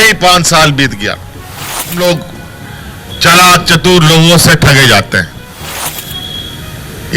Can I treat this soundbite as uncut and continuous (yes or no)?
no